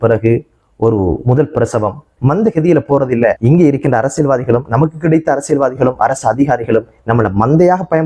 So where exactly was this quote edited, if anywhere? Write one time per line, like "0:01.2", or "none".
0:02.1
0:03.4

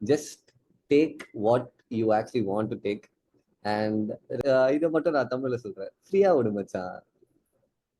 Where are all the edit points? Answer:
0:04.4

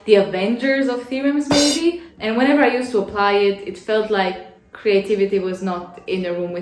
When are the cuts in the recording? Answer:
0:02.1

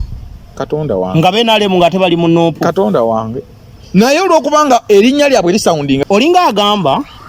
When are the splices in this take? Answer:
0:06.0

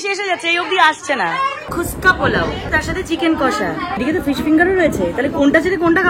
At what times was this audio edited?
0:01.7
0:02.7
0:04.0

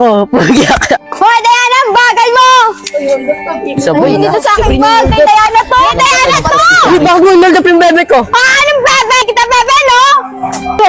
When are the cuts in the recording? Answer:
0:05.9

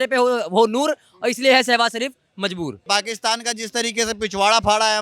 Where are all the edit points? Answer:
0:02.8

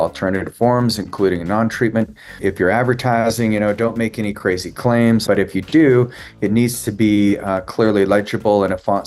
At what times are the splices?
0:02.4
0:05.2

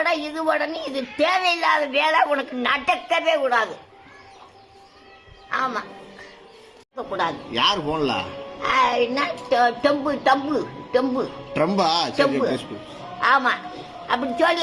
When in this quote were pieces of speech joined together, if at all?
0:07.1

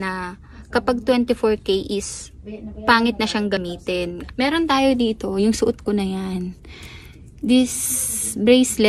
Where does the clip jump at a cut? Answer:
0:03.7

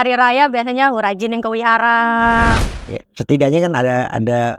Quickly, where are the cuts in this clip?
0:02.6

